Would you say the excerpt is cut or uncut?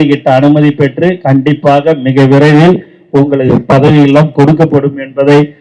uncut